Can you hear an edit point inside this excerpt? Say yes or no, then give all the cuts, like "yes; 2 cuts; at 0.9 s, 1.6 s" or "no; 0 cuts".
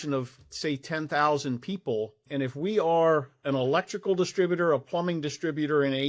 yes; 1 cut; at 2.2 s